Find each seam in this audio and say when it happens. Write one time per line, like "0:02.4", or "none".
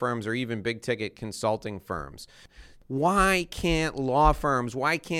0:02.6

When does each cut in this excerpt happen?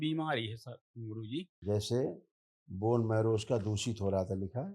0:01.5

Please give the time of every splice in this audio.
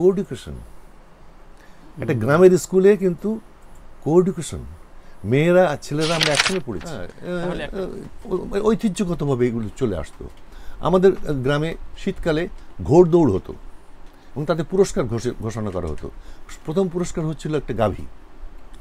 0:06.9

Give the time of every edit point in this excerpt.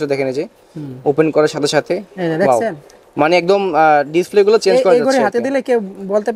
none

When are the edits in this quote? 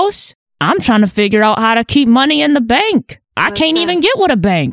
none

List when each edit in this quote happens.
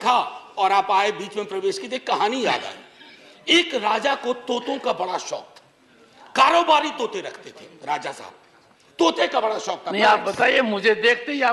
none

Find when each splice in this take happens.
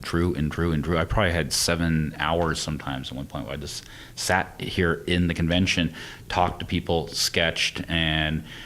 0:02.2

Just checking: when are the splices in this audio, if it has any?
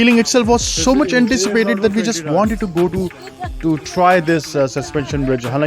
none

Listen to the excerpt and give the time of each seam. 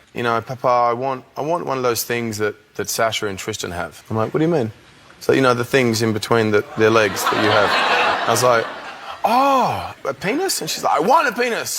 none

